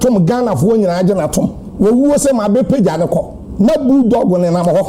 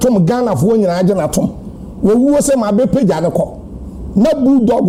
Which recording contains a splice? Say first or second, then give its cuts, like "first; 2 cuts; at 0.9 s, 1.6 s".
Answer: first; 2 cuts; at 1.6 s, 3.4 s